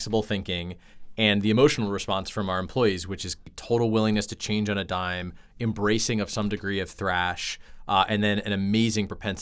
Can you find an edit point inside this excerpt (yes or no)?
yes